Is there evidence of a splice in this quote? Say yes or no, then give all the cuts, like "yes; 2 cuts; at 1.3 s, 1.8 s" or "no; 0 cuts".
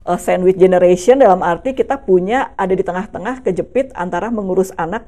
no; 0 cuts